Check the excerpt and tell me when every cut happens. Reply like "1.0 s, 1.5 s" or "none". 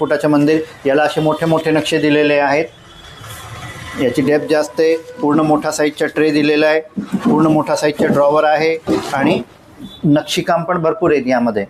none